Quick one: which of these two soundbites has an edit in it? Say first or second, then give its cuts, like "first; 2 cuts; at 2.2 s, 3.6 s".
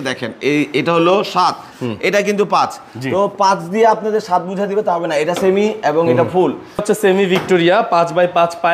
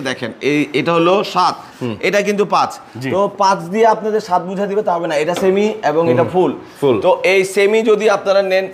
first; 1 cut; at 6.8 s